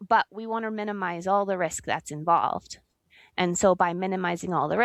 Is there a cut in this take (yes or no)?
no